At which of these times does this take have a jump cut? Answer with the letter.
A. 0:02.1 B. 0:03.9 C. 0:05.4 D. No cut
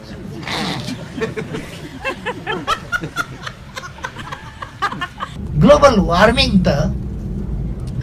C